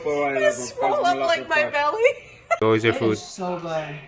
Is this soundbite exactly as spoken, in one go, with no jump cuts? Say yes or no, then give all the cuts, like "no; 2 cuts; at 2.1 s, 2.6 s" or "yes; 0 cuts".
no; 1 cut; at 2.6 s